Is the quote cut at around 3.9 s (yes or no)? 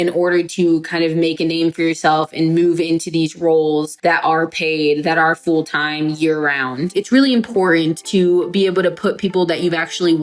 yes